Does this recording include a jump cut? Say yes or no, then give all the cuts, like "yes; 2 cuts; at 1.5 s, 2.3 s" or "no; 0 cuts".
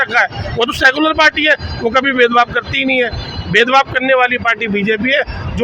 no; 0 cuts